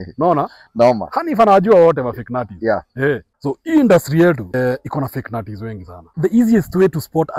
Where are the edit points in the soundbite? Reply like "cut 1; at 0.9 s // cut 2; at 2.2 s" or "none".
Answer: cut 1; at 3.3 s // cut 2; at 4.5 s // cut 3; at 6.0 s